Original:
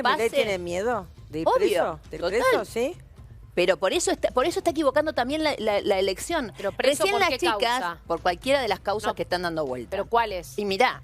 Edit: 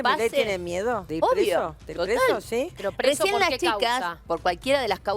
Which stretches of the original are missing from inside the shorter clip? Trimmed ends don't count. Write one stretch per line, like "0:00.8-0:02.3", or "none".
0:01.1-0:01.3
0:03.0-0:06.6